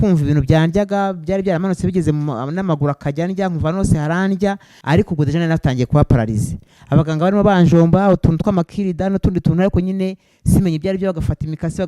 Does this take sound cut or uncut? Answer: cut